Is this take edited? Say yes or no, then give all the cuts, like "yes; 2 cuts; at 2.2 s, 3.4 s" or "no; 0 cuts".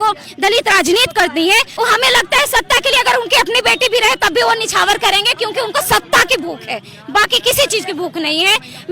yes; 1 cut; at 1.7 s